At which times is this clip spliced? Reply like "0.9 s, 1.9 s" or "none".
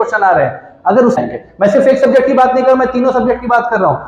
1.2 s